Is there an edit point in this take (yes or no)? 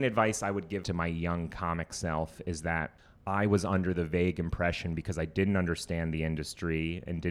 yes